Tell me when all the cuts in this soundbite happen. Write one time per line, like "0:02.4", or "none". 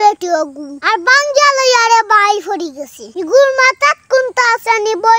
0:03.0